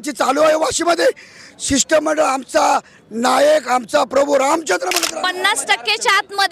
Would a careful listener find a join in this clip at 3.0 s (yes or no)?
no